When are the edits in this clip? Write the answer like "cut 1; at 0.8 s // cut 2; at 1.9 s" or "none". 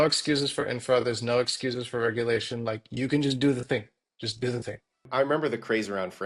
cut 1; at 5.0 s

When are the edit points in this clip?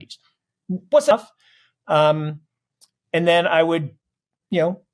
cut 1; at 1.1 s

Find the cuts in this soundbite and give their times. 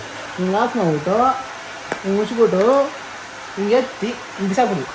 none

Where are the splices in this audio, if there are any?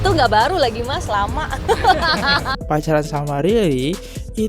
cut 1; at 2.6 s

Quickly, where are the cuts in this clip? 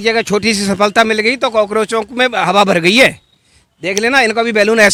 none

